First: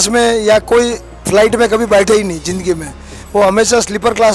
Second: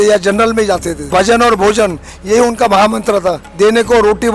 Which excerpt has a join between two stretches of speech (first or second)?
second